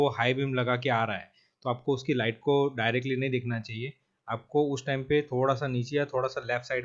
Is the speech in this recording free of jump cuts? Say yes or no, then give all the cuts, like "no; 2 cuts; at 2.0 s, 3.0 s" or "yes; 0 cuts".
yes; 0 cuts